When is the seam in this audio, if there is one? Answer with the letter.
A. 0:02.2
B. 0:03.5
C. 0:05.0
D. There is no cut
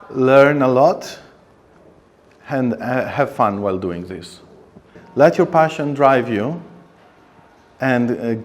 C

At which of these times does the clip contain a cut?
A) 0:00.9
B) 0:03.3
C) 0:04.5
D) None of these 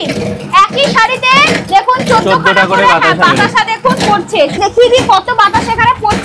C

